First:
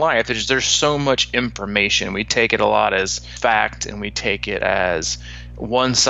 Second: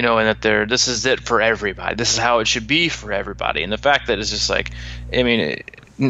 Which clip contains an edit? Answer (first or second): first